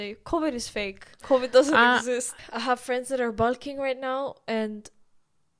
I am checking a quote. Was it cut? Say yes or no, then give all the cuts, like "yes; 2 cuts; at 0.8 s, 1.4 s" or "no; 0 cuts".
yes; 1 cut; at 2.4 s